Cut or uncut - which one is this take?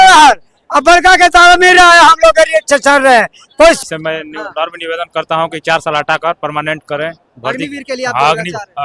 cut